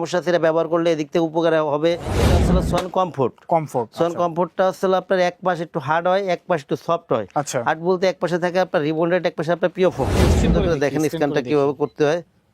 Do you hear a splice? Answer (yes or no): yes